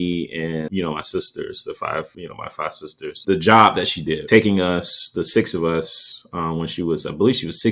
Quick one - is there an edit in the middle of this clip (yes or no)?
yes